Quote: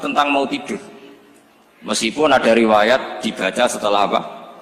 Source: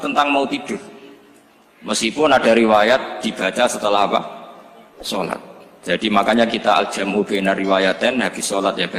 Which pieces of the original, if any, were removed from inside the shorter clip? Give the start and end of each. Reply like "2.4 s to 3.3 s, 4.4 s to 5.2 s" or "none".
none